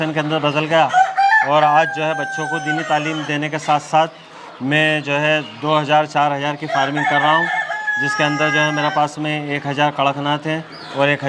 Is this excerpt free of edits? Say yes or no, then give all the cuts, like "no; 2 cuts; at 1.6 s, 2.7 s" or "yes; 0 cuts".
yes; 0 cuts